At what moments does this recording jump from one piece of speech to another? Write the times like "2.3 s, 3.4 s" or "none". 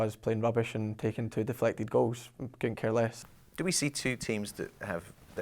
none